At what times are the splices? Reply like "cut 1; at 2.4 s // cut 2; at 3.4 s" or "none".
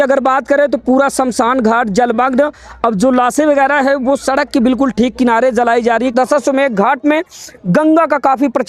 cut 1; at 6.1 s